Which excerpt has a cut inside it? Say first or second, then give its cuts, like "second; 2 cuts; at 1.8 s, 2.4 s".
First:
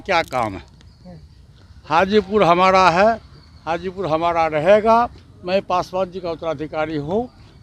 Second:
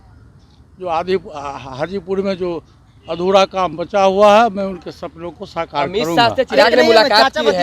first; 1 cut; at 5.3 s